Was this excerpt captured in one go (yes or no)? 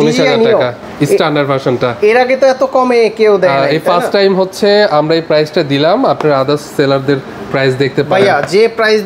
yes